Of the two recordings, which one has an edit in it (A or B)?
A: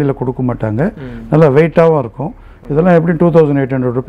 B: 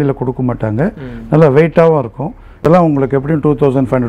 B